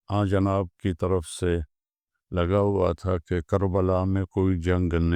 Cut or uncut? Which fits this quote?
uncut